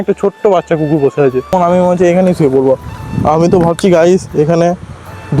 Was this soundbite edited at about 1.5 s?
yes; 1 cut; at 1.5 s

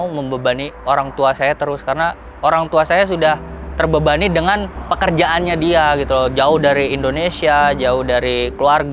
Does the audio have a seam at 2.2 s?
no; 0 cuts

